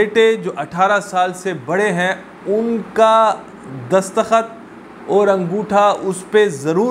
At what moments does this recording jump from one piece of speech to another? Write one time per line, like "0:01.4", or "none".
none